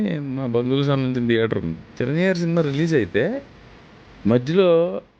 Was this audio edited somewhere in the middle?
yes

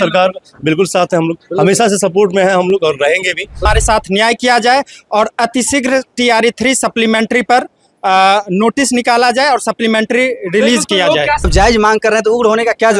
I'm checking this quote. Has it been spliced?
yes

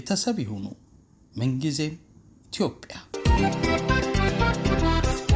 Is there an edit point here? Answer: yes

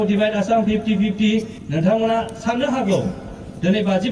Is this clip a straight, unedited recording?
no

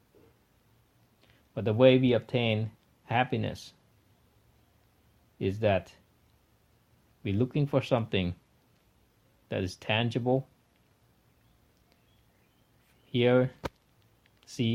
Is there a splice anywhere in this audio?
yes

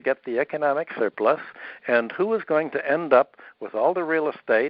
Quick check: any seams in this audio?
no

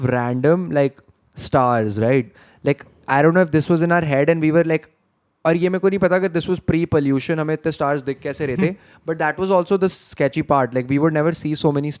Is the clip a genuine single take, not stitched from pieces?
yes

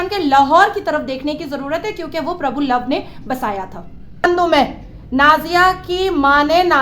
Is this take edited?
yes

